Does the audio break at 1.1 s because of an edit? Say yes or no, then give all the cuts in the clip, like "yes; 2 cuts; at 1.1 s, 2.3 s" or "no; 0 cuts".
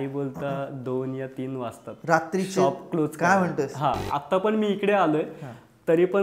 no; 1 cut; at 4.0 s